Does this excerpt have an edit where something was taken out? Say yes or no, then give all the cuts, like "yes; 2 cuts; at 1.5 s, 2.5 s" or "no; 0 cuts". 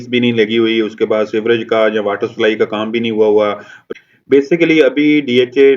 yes; 1 cut; at 3.7 s